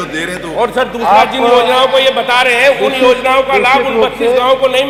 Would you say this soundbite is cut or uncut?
uncut